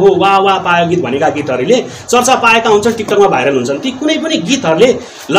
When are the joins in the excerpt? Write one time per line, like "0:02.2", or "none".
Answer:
none